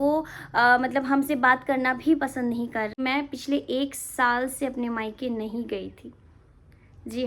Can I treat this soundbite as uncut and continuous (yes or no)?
no